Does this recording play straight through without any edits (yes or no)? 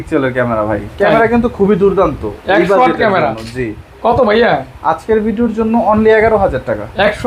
yes